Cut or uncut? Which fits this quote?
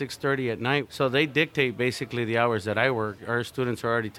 cut